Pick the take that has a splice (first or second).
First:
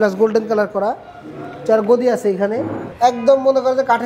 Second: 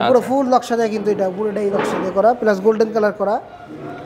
first